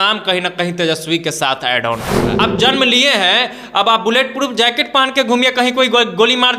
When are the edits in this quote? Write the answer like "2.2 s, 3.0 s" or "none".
2.3 s